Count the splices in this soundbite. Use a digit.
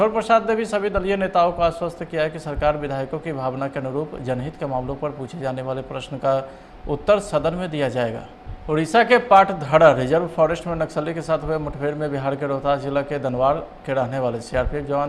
1